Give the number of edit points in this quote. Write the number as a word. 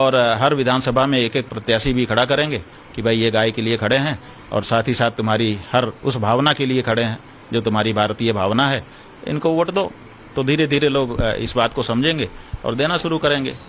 zero